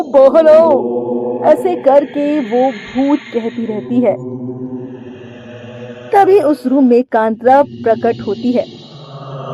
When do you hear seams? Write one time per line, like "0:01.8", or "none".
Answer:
none